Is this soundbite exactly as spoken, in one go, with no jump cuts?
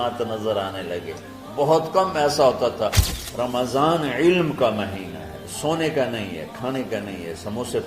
no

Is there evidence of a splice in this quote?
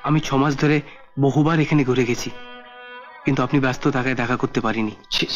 no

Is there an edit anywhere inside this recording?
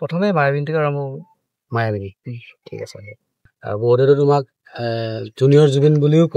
yes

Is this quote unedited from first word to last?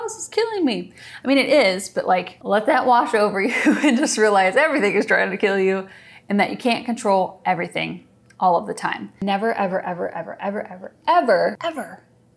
no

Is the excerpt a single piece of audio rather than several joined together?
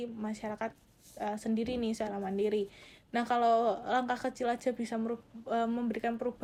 yes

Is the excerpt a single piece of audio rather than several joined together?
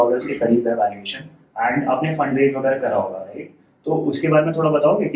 yes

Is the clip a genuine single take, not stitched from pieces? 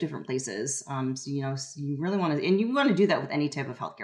yes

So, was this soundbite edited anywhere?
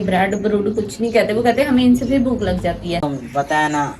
yes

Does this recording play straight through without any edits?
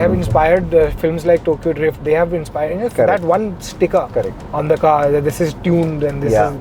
yes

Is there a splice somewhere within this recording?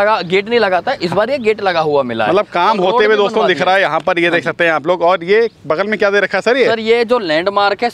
no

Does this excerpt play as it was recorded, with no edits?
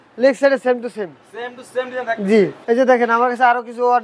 no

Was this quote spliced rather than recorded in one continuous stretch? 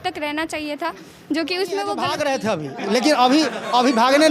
yes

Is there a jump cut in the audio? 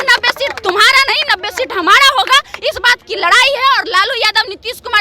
no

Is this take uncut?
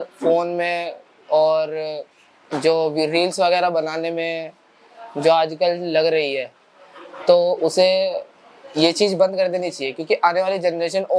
yes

